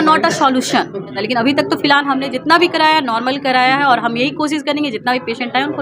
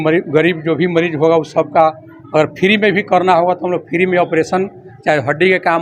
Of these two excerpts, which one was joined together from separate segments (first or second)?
first